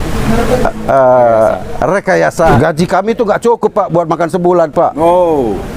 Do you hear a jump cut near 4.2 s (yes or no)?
no